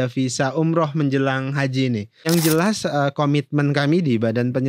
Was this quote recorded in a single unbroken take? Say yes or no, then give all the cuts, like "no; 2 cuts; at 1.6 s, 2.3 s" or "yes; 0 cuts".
no; 1 cut; at 2.3 s